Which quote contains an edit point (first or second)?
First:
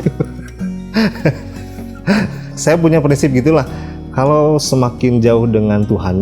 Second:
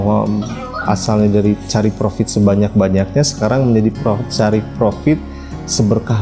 first